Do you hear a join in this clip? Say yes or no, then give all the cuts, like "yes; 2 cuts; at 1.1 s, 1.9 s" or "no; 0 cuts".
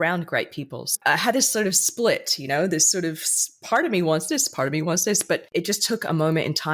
yes; 2 cuts; at 0.9 s, 5.5 s